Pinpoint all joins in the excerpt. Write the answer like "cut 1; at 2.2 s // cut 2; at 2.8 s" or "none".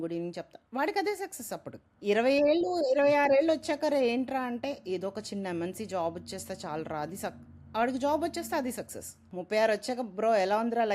cut 1; at 2.0 s // cut 2; at 9.3 s